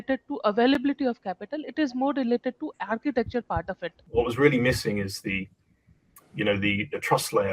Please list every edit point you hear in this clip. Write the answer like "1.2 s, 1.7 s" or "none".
4.0 s